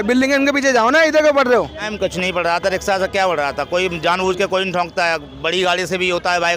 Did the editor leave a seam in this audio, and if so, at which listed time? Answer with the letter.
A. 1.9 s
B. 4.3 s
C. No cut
A